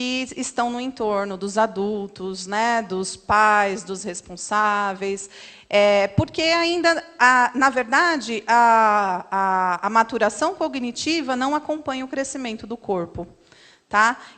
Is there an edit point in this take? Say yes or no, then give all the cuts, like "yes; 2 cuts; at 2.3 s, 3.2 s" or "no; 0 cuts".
no; 0 cuts